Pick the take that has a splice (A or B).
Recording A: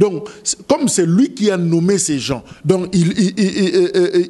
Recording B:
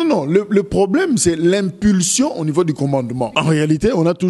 B